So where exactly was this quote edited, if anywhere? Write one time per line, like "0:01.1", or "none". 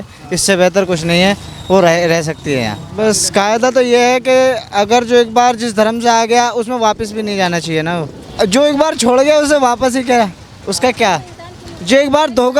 0:02.8
0:08.2